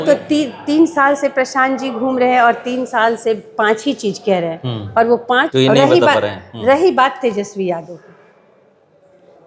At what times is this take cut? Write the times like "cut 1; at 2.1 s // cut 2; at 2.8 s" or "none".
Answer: cut 1; at 5.5 s